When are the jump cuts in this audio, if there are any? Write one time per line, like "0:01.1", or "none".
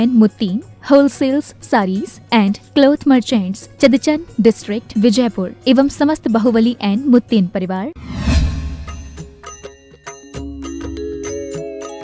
0:08.0